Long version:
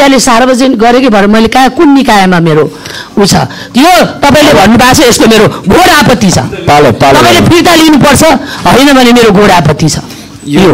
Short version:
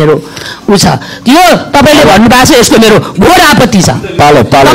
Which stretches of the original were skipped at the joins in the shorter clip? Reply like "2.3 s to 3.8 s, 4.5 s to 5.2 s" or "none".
none